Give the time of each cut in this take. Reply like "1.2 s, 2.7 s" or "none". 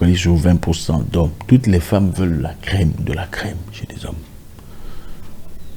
none